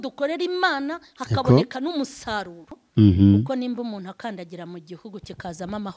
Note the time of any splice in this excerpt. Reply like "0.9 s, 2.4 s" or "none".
2.6 s